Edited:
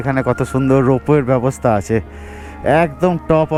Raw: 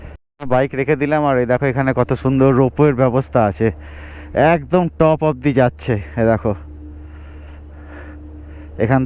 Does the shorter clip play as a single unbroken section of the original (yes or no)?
yes